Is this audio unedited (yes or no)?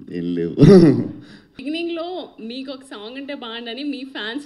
yes